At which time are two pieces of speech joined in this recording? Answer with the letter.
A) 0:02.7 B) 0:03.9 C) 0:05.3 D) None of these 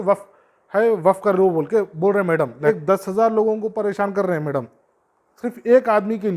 A